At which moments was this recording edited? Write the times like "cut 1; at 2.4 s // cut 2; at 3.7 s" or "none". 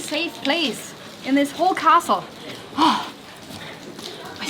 none